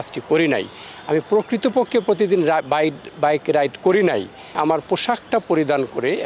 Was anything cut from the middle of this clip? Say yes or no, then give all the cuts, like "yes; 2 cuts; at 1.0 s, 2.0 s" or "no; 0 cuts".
yes; 1 cut; at 4.6 s